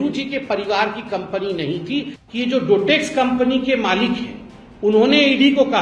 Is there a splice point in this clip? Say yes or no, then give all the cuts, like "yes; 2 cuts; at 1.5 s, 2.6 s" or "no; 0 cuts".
yes; 1 cut; at 2.2 s